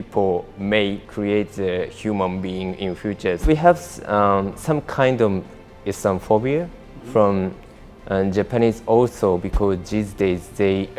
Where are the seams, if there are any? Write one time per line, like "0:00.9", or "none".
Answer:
0:01.1
0:03.4